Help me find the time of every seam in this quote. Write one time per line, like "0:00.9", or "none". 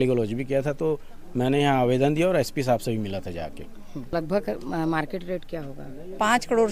0:04.1